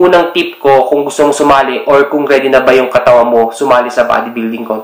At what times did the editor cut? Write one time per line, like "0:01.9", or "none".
none